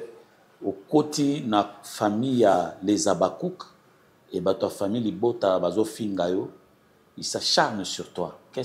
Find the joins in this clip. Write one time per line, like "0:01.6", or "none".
none